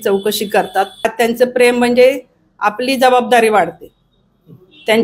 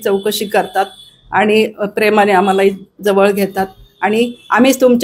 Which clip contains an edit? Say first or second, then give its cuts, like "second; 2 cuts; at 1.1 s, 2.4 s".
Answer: first; 1 cut; at 1.1 s